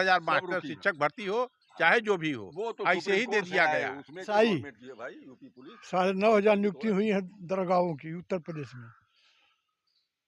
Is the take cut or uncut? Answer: cut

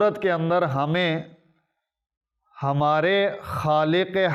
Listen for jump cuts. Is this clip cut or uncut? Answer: uncut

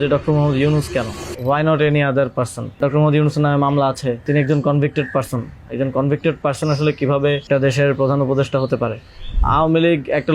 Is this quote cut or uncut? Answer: cut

